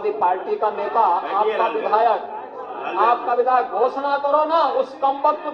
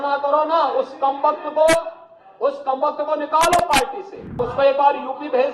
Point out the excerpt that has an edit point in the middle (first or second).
second